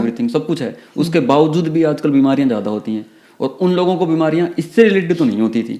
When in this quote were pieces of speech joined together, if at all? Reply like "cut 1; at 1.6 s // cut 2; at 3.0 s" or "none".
none